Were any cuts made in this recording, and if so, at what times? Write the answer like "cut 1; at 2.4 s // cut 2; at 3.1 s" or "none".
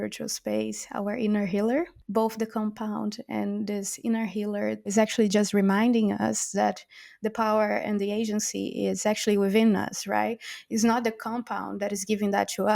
cut 1; at 2.0 s // cut 2; at 4.9 s